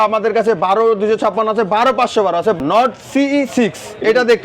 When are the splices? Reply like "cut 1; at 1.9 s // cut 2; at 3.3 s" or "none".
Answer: cut 1; at 2.6 s